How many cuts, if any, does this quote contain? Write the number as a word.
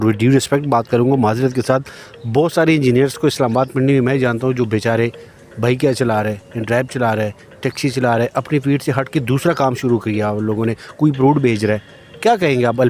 zero